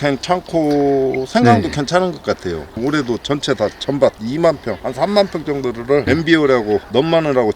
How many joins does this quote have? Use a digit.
1